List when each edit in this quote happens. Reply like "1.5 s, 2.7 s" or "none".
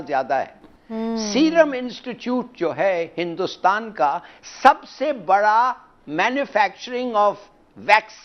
0.9 s